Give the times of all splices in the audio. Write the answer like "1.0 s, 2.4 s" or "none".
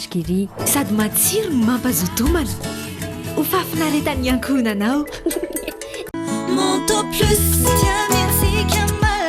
none